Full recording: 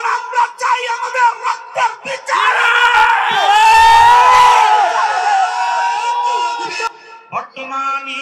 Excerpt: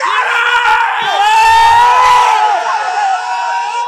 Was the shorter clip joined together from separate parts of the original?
no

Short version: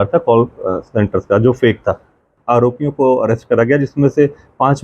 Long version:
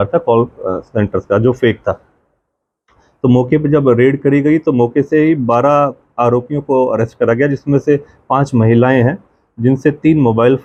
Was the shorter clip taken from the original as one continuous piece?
no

